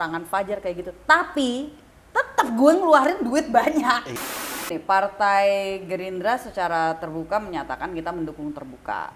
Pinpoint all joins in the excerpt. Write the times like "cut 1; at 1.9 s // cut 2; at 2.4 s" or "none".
cut 1; at 4.6 s